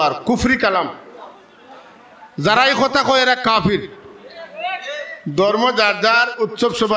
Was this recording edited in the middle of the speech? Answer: no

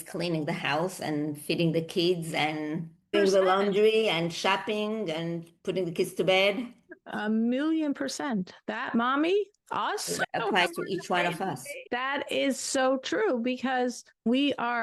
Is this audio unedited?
yes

